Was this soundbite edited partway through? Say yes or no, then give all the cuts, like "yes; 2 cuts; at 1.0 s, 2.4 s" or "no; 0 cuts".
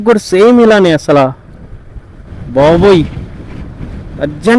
no; 0 cuts